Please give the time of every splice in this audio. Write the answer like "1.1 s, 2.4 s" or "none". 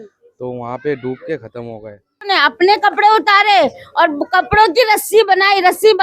2.3 s